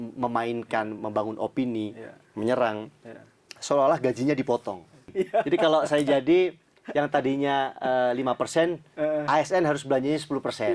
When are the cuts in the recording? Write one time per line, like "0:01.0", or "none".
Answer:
0:05.1